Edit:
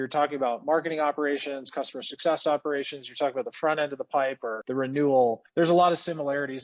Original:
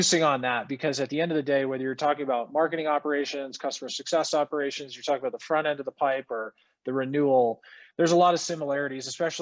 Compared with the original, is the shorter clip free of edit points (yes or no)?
no